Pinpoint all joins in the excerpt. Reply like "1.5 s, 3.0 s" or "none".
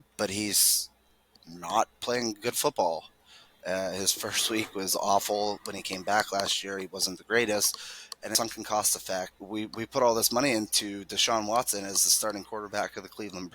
8.3 s, 9.4 s